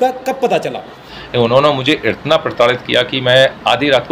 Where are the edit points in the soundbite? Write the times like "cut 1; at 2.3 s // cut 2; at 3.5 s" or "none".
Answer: cut 1; at 1.1 s